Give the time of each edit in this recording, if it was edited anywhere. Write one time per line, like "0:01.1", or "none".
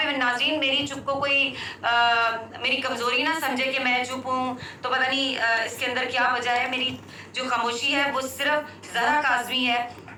none